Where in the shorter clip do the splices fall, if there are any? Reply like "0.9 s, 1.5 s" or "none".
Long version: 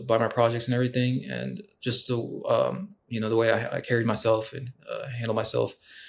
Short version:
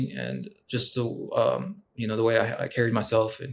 none